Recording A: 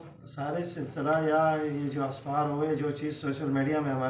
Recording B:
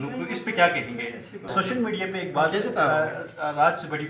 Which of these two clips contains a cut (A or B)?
B